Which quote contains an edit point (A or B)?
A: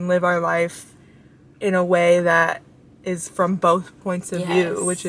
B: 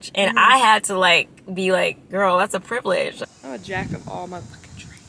B